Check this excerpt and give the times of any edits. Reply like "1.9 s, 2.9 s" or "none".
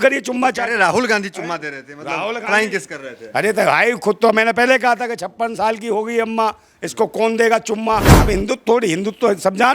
8.1 s